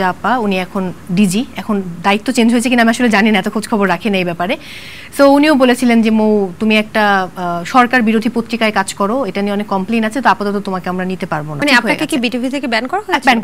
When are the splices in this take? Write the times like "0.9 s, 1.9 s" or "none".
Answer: 11.5 s